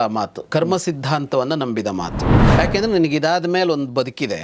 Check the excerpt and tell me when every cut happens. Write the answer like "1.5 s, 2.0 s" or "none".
2.4 s